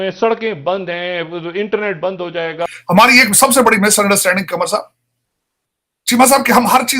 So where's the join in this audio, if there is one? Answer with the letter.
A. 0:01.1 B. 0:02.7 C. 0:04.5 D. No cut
B